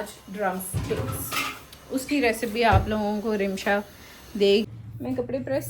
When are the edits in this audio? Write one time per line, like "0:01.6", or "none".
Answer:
0:04.7